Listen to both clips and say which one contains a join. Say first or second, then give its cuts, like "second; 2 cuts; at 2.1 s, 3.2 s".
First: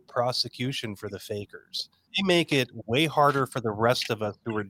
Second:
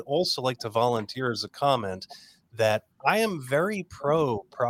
first; 1 cut; at 2.0 s